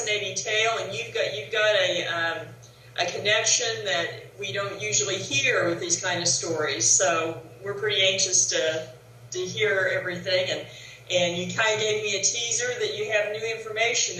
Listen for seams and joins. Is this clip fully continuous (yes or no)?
no